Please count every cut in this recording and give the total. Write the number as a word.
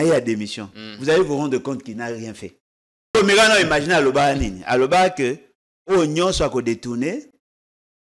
one